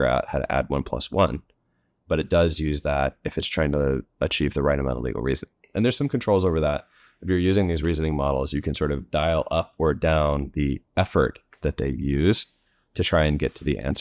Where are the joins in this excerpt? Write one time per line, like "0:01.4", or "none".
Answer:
none